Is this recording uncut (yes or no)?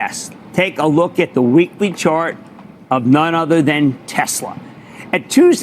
yes